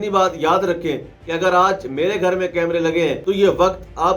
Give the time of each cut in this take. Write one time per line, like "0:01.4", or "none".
0:03.2